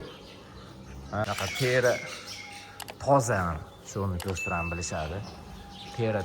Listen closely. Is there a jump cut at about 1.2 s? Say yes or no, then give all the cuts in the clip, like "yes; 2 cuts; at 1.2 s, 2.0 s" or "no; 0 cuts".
yes; 1 cut; at 1.2 s